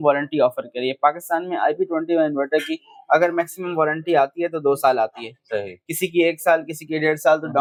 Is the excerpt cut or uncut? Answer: uncut